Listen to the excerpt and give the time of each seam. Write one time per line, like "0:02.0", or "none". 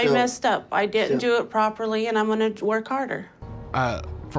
0:03.4